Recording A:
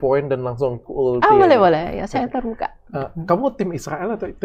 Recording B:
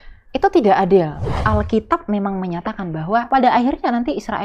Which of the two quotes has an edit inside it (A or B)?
B